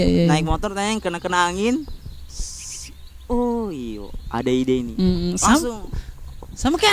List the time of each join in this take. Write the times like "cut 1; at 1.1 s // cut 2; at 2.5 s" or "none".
none